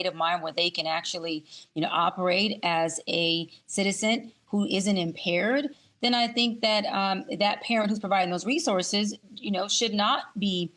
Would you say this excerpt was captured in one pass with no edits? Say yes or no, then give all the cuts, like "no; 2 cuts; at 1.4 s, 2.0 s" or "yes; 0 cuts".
yes; 0 cuts